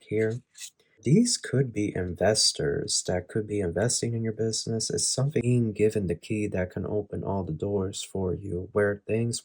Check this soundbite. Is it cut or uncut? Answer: cut